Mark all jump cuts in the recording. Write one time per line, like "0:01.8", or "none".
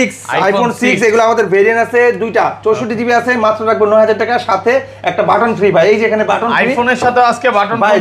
none